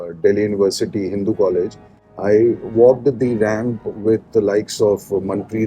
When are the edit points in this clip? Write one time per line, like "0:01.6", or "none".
none